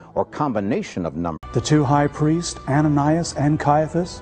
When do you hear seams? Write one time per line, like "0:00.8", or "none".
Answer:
none